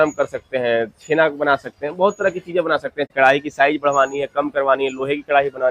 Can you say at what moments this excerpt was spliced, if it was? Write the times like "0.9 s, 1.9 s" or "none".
3.1 s